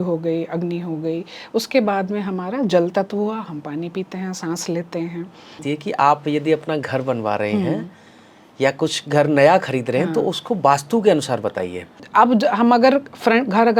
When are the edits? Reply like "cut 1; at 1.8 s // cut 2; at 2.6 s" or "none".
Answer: cut 1; at 5.6 s // cut 2; at 12.0 s